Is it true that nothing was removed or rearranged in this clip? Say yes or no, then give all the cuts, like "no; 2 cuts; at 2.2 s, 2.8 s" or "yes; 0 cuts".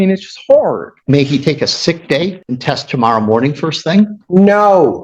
no; 3 cuts; at 0.9 s, 2.5 s, 4.2 s